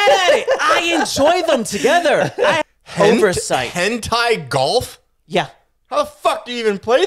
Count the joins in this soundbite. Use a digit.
1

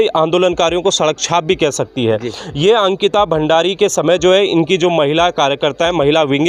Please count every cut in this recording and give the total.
0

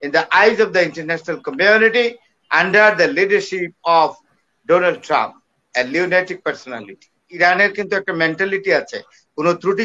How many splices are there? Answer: 1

